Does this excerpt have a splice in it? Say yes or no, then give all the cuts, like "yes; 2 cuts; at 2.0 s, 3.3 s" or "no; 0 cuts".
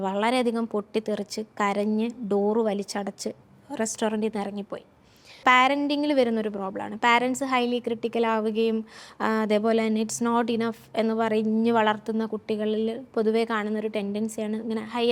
yes; 1 cut; at 5.4 s